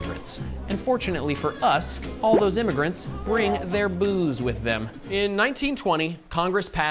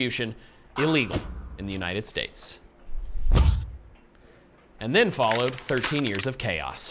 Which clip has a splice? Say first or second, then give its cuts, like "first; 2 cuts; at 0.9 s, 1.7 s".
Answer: first; 1 cut; at 4.9 s